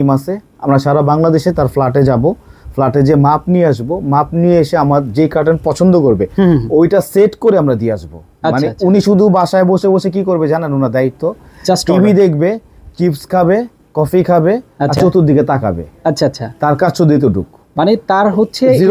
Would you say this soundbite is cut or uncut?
uncut